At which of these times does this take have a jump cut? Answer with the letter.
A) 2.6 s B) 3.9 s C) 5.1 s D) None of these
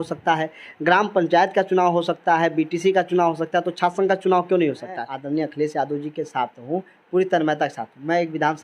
C